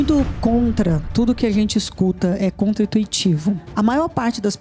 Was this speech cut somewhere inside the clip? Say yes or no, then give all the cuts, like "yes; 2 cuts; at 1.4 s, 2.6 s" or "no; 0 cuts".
yes; 1 cut; at 3.7 s